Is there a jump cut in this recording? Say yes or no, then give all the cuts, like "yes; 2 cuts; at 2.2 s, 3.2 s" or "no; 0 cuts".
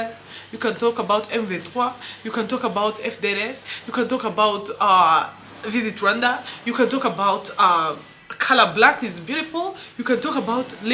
no; 0 cuts